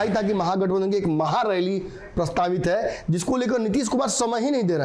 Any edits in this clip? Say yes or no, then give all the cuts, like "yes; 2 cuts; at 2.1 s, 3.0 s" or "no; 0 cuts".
no; 0 cuts